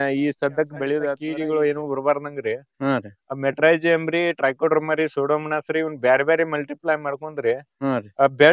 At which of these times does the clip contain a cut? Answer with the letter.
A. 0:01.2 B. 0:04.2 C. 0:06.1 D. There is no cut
A